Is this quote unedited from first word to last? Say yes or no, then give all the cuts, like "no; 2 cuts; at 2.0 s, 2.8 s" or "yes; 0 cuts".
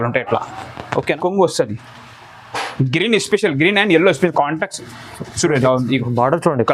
no; 1 cut; at 1.0 s